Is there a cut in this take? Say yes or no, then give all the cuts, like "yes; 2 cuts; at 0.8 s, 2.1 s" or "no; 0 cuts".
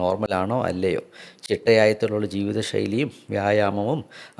no; 0 cuts